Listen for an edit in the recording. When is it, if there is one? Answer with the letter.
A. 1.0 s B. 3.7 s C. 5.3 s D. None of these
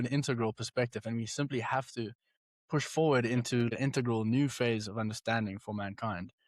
B